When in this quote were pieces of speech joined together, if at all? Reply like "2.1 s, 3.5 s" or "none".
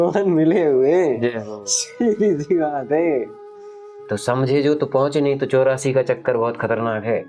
4.1 s